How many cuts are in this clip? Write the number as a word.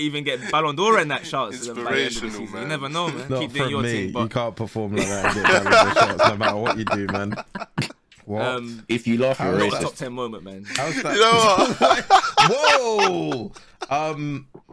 two